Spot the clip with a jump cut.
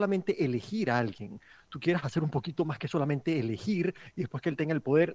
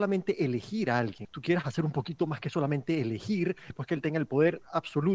second; 2 cuts; at 1.3 s, 3.7 s

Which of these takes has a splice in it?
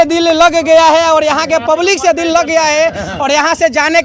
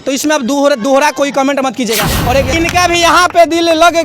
second; 1 cut; at 2.5 s

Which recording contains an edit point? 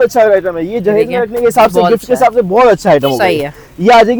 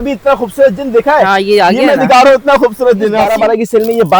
second; 1 cut; at 3.2 s

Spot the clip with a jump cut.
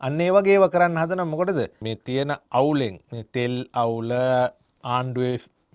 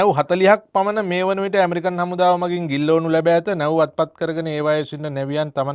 first; 1 cut; at 1.9 s

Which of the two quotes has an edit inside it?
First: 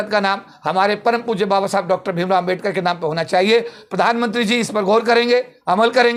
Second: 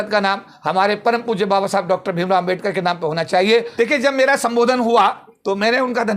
second; 1 cut; at 3.7 s

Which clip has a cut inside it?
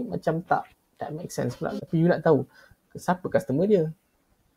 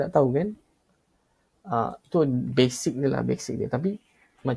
first; 1 cut; at 1.8 s

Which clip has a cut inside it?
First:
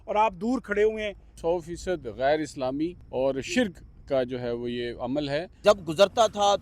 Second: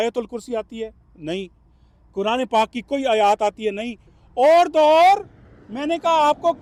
first; 3 cuts; at 1.3 s, 3.0 s, 5.5 s

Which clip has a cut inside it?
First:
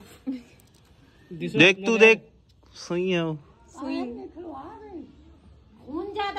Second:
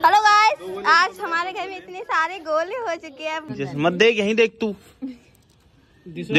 second; 1 cut; at 3.5 s

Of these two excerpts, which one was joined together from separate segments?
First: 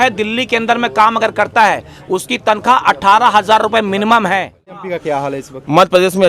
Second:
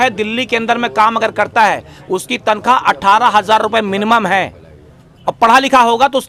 first; 1 cut; at 4.9 s

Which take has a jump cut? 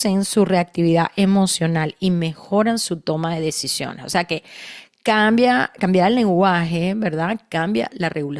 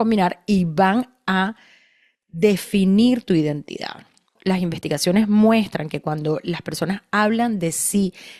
second; 1 cut; at 4.4 s

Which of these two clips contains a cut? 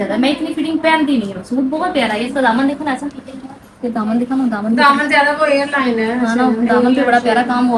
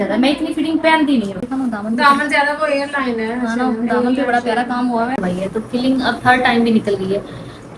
second; 2 cuts; at 1.5 s, 5.2 s

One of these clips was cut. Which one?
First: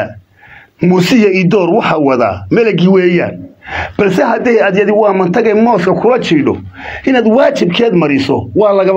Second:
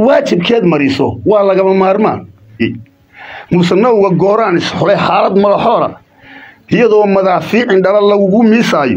second; 1 cut; at 2.6 s

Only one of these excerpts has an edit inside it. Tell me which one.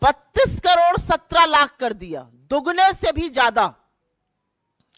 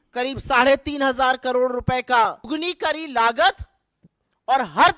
second; 1 cut; at 2.5 s

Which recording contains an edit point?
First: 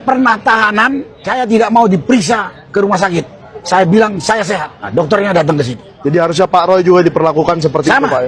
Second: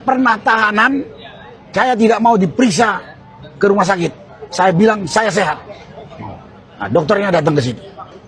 first; 4 cuts; at 1.1 s, 2.6 s, 4.7 s, 5.8 s

